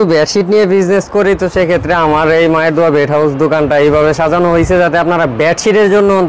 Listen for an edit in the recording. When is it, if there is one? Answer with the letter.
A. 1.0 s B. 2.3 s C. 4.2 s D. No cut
D